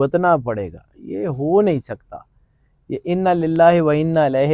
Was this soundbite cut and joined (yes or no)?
no